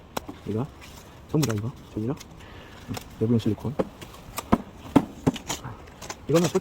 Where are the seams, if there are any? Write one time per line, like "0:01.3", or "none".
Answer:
none